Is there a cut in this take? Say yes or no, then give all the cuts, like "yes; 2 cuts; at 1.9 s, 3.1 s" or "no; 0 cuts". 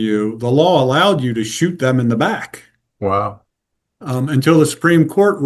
no; 0 cuts